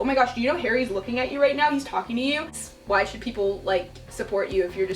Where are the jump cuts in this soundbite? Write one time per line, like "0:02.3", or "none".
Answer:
0:02.6

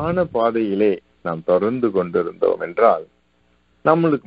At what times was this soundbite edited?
none

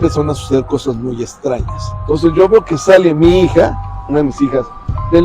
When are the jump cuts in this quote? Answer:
0:01.9

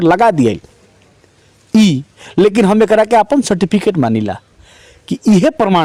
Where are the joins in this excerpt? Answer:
none

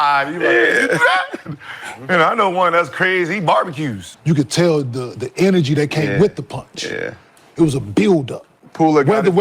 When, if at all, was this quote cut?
0:04.1

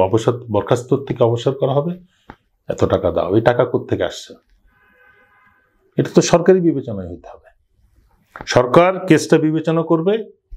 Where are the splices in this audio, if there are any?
none

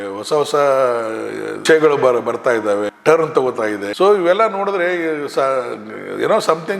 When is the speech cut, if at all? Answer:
none

